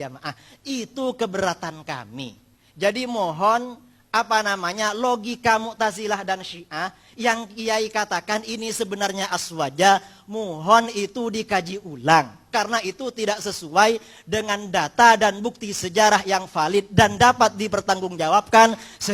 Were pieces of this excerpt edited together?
no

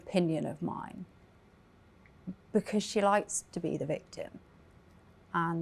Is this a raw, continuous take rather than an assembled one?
yes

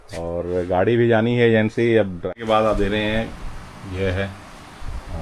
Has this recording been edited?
yes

